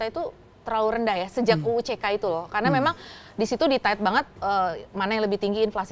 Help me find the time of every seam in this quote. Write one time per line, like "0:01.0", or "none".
none